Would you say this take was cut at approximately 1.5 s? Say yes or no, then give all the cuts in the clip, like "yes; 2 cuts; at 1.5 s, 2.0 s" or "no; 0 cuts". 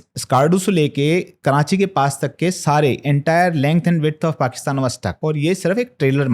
no; 1 cut; at 5.1 s